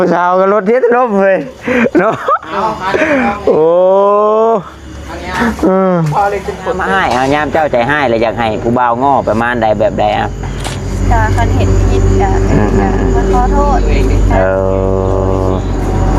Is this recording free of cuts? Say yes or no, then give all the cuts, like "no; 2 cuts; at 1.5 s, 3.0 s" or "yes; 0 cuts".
no; 2 cuts; at 6.8 s, 11.0 s